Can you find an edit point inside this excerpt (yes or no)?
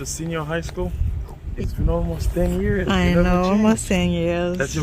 yes